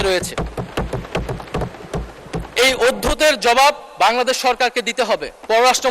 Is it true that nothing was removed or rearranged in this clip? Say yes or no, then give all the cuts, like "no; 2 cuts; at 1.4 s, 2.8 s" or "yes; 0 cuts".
no; 1 cut; at 2.5 s